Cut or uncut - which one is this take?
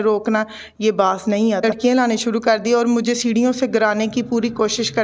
cut